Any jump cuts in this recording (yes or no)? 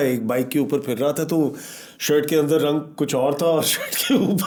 no